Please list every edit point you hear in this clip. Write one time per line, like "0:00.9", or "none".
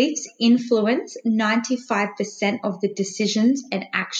none

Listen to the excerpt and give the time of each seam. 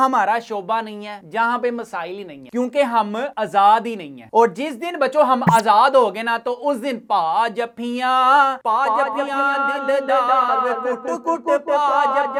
none

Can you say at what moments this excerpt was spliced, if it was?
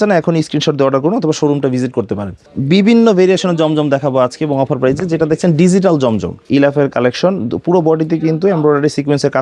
0:02.4
0:06.5

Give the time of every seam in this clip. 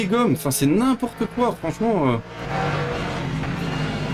none

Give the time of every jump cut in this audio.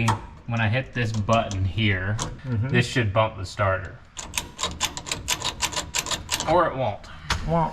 0:02.3

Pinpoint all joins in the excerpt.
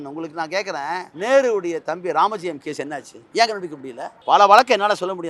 0:01.1
0:03.4
0:04.3

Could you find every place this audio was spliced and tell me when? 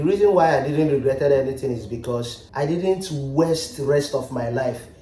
0:02.4

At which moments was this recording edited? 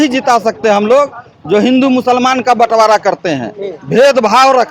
none

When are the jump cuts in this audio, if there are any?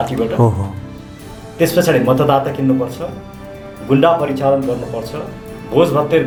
none

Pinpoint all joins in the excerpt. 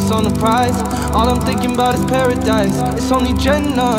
none

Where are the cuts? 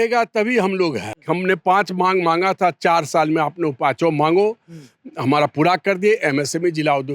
0:01.1

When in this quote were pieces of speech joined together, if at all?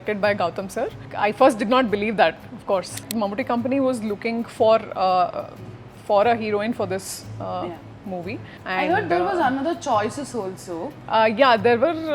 0:01.1
0:03.1
0:08.5
0:10.9

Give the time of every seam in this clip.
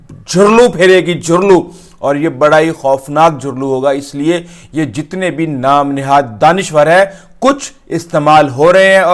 none

